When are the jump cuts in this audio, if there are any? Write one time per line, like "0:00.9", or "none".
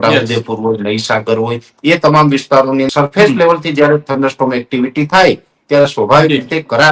0:02.9